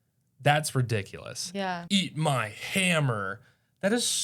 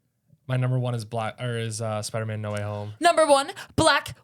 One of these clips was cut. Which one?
first; 1 cut; at 1.8 s

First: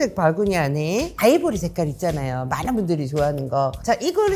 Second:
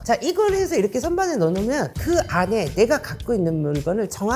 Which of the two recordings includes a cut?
second; 1 cut; at 1.9 s

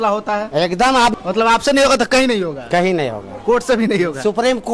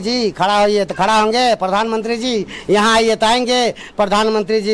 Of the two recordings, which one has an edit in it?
first; 1 cut; at 1.1 s

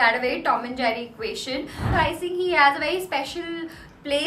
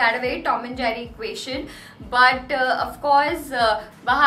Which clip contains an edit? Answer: first; 1 cut; at 1.9 s

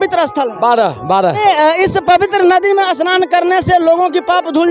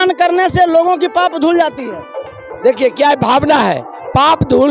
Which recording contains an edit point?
first; 1 cut; at 1.4 s

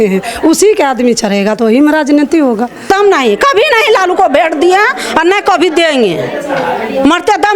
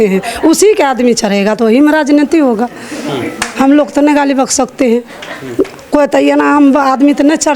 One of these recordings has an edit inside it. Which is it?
first; 1 cut; at 2.9 s

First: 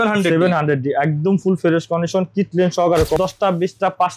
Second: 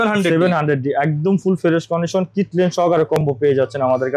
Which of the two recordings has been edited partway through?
first; 1 cut; at 3.2 s

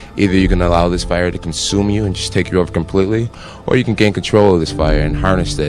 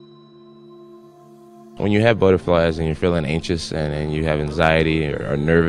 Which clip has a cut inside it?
second; 1 cut; at 1.8 s

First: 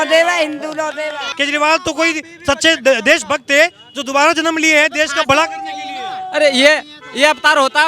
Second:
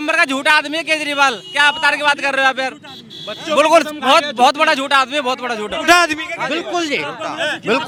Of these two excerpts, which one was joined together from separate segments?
first; 1 cut; at 1.1 s

